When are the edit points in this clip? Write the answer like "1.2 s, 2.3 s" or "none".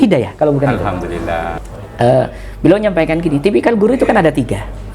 1.5 s